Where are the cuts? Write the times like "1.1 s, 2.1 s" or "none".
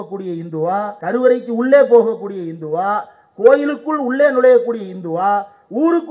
1.0 s